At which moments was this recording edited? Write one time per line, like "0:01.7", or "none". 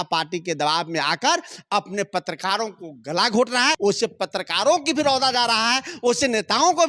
0:03.8

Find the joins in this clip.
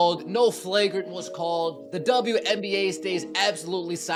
none

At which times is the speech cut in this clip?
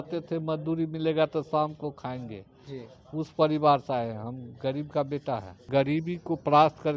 0:05.6

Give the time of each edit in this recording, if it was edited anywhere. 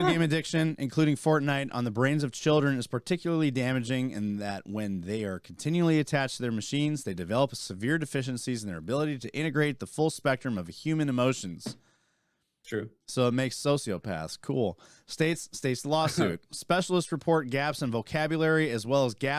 none

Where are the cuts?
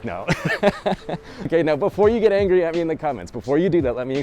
0:01.5

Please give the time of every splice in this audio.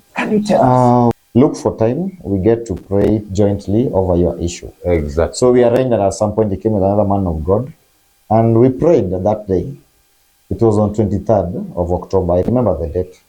0:01.2

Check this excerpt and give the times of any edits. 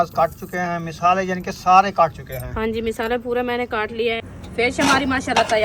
0:04.2

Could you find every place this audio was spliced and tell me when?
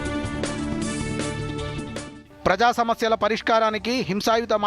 0:02.1

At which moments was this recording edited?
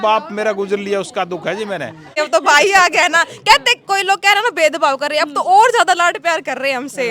0:02.0

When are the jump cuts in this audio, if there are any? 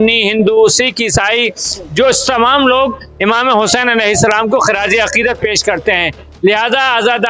none

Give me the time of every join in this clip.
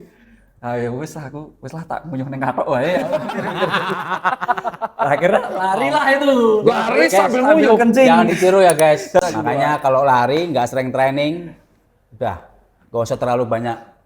0:09.2

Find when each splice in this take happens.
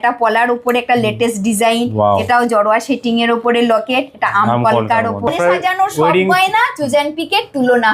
0:05.3

